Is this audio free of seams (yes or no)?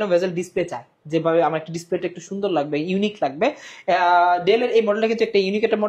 yes